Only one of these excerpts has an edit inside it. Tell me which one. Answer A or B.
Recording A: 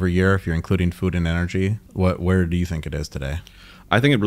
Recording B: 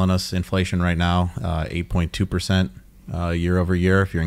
A